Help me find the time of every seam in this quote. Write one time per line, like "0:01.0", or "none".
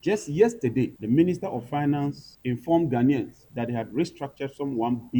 0:01.0
0:02.3
0:03.4